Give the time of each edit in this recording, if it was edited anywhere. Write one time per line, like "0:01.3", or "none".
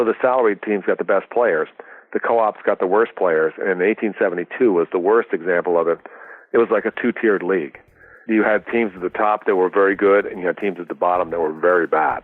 0:08.2